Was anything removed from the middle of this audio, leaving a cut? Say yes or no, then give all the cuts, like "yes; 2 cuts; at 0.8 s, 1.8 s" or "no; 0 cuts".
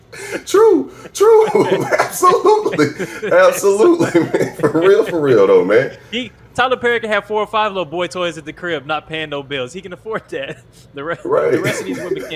no; 0 cuts